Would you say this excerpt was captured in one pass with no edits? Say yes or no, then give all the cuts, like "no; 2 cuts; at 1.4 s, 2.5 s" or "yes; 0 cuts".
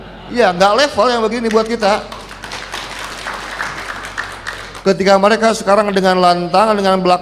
no; 1 cut; at 4.6 s